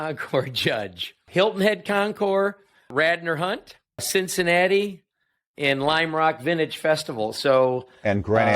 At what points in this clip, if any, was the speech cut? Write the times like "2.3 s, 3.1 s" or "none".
1.3 s, 2.9 s, 4.1 s